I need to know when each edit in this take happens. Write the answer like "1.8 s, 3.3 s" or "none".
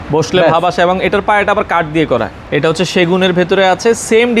2.4 s